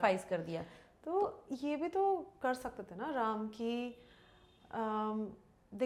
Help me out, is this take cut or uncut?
uncut